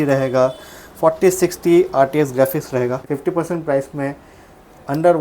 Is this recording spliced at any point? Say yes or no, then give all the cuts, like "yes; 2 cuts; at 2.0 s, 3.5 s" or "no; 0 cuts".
yes; 1 cut; at 3.0 s